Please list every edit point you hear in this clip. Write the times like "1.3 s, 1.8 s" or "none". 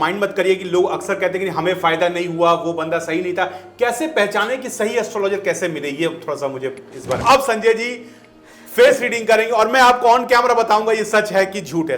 7.2 s